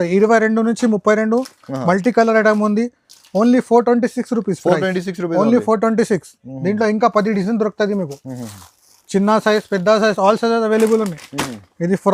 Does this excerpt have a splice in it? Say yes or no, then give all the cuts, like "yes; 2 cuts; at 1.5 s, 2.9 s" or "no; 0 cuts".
no; 0 cuts